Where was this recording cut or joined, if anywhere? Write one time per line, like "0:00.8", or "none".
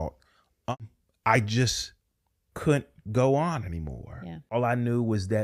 0:00.7
0:04.5